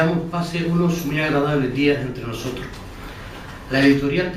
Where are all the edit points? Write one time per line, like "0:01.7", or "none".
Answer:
0:01.1